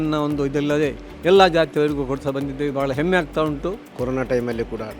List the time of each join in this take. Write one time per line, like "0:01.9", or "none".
0:03.8